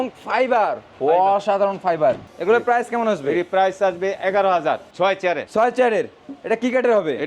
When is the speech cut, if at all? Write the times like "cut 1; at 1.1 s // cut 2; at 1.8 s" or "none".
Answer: cut 1; at 2.3 s // cut 2; at 4.9 s

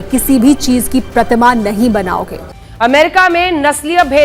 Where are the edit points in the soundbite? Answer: cut 1; at 2.4 s

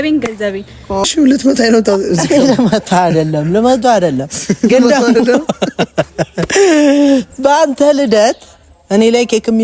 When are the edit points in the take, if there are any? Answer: cut 1; at 1.0 s

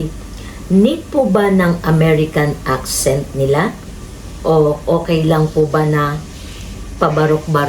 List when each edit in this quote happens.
none

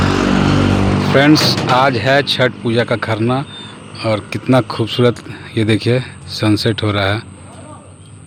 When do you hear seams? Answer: none

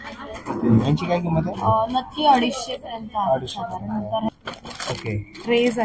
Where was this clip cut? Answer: cut 1; at 4.3 s

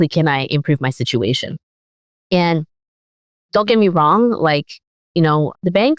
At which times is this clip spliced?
none

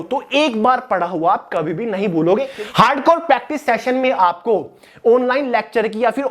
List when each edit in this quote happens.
cut 1; at 2.5 s

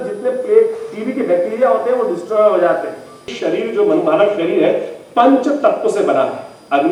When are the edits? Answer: cut 1; at 3.3 s

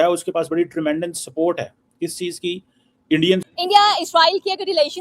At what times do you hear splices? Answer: cut 1; at 3.5 s

